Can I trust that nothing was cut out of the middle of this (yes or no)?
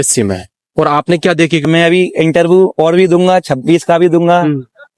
no